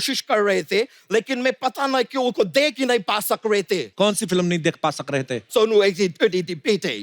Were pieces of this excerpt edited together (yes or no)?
yes